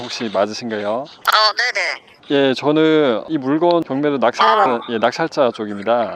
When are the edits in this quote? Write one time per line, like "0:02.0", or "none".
none